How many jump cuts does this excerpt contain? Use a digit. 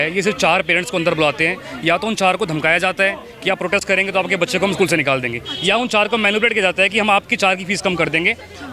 0